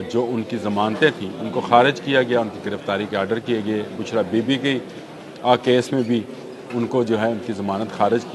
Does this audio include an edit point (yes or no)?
no